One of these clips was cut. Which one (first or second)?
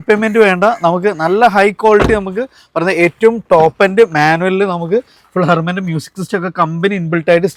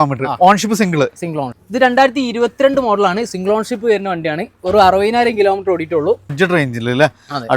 second